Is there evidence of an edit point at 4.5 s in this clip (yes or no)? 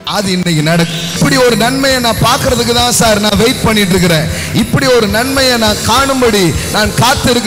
no